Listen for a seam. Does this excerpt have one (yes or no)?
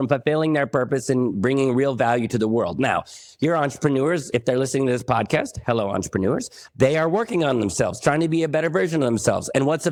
no